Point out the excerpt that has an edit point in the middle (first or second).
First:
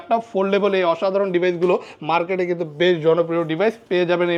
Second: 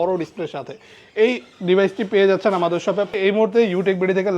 second